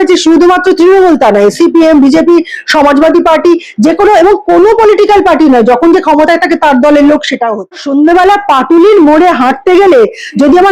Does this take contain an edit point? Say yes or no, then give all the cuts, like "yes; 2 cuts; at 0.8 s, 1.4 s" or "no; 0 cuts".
yes; 1 cut; at 7.8 s